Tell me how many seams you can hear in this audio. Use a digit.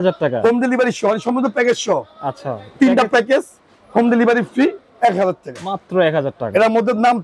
0